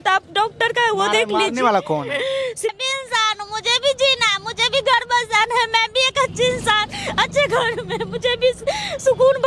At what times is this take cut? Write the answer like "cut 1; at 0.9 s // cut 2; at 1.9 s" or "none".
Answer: cut 1; at 2.7 s